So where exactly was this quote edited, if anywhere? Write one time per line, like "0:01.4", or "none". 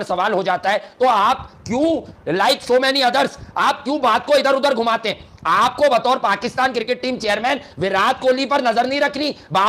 none

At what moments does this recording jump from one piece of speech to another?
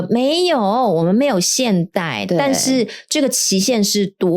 none

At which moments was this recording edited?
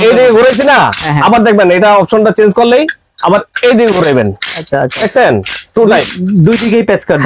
none

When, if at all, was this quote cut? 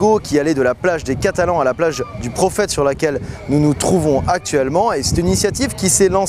0:01.0

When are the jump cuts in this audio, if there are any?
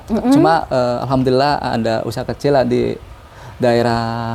none

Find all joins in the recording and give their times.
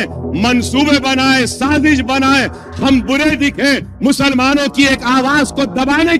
none

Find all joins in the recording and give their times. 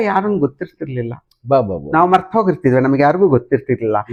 none

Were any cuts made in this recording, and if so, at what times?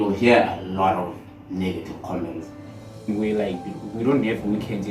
0:03.1

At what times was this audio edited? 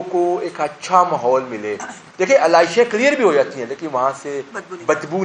none

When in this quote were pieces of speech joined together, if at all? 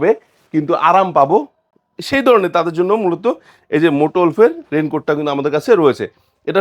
none

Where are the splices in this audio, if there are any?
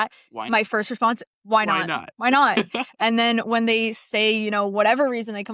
none

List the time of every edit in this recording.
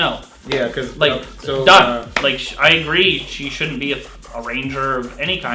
none

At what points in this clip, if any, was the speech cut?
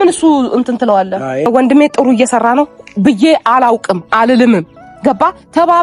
0:01.5

